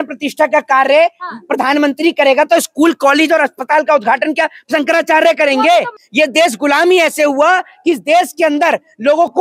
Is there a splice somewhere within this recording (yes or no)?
yes